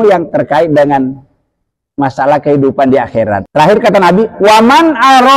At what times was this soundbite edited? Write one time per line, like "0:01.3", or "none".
0:03.5

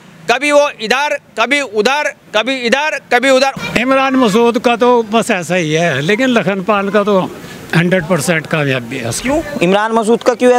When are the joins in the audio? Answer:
0:03.5

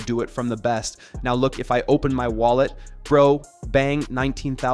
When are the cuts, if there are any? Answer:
none

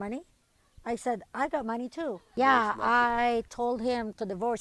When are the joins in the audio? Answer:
0:02.2

